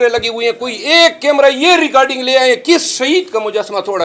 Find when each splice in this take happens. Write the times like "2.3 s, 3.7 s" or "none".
none